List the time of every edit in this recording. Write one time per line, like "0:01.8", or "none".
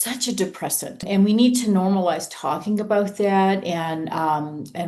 0:01.1